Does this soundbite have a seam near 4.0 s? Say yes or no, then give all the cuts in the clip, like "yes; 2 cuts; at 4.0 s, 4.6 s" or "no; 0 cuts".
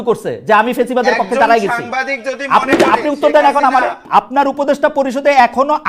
yes; 1 cut; at 4.0 s